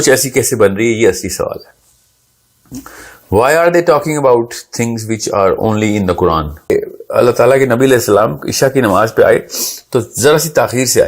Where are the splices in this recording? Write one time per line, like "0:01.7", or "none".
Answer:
0:06.7

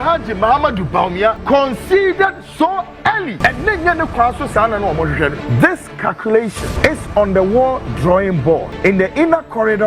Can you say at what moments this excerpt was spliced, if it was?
0:01.4
0:03.4
0:05.4
0:06.7
0:08.7

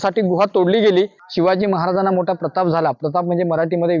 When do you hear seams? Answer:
0:01.2

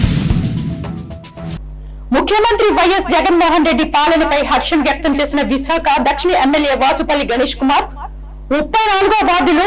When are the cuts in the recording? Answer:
0:01.1

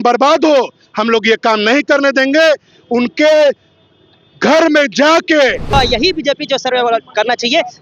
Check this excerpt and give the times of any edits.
0:05.7

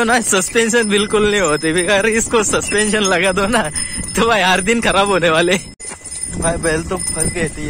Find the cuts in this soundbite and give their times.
0:05.7

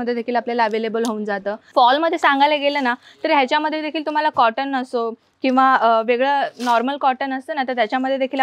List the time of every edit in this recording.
0:01.6

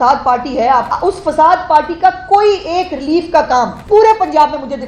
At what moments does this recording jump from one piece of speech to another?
0:00.9
0:03.8

